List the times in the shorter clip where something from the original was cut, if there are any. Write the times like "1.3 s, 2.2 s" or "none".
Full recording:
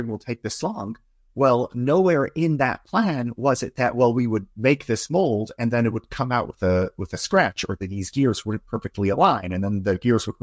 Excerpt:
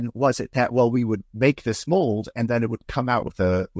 none

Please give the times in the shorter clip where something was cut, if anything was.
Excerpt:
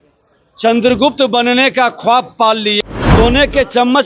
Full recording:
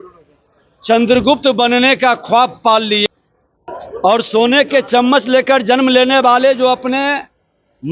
3.1 s

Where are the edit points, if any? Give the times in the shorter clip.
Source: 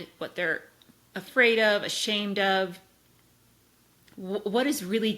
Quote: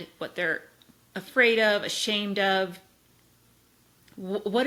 none

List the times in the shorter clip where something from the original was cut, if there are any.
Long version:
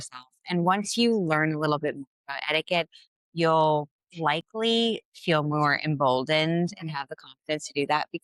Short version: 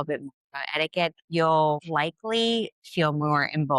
1.2 s, 1.8 s

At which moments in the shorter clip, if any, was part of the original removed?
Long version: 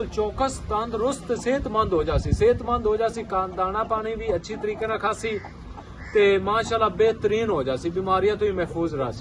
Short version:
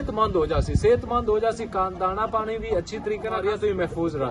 3.4 s

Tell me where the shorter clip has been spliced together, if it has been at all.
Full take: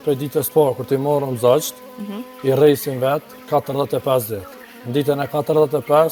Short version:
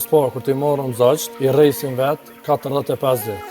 1.3 s

